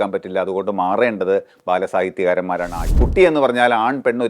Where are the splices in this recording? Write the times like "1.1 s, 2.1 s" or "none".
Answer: 2.8 s

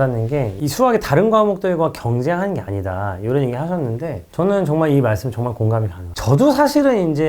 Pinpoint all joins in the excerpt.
6.1 s

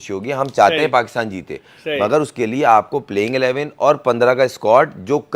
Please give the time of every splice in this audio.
none

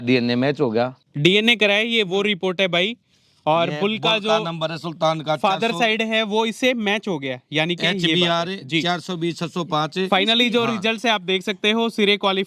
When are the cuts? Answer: 1.0 s

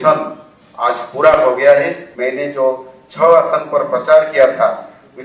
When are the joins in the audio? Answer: 2.1 s

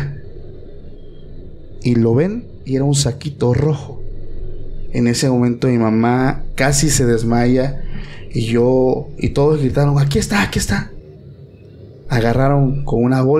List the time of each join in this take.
none

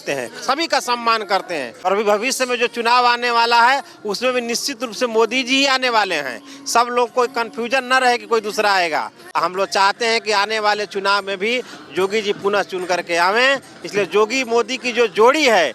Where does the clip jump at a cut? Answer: 1.8 s, 9.2 s

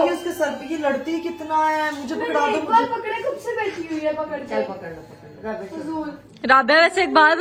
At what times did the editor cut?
none

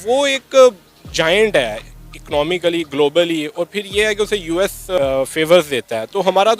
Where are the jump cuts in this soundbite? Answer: 5.0 s

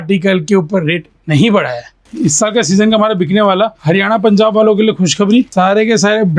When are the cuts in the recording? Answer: 2.0 s, 3.8 s, 5.5 s

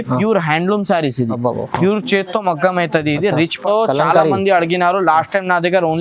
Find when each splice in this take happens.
3.7 s

